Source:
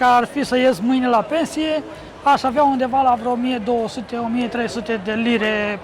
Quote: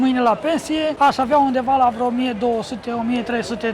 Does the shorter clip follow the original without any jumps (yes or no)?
no